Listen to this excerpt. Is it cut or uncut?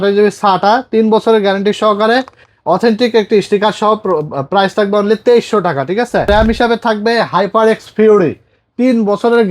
cut